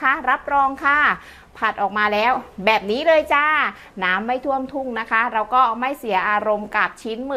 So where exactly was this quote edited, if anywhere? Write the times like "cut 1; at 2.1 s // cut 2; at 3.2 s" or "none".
none